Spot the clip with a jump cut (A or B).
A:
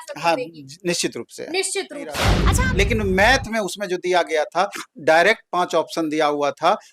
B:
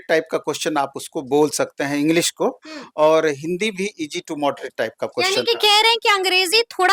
A